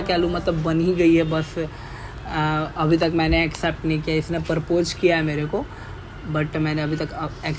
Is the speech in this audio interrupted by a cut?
no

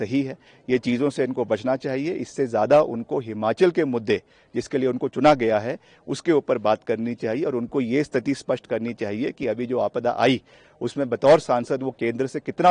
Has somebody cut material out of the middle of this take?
no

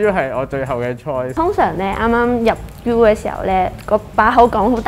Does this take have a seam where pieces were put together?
yes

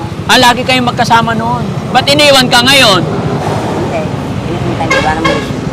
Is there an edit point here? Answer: yes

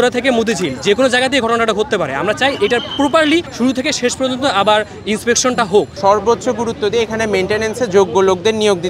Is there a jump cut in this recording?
yes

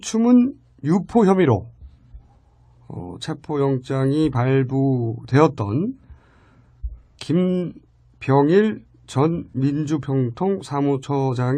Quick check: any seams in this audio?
yes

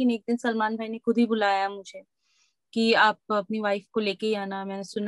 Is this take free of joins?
yes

